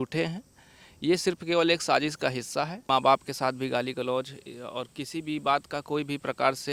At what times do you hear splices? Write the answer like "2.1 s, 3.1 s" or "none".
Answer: 2.8 s